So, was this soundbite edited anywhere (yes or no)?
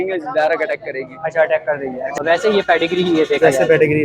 yes